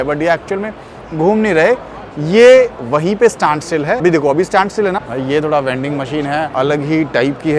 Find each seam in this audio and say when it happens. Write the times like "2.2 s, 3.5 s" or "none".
4.0 s, 5.1 s, 6.5 s